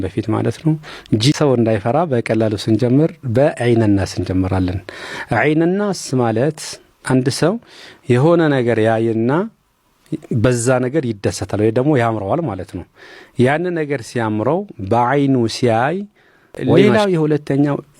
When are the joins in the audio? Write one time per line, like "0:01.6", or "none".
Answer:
0:01.3
0:16.8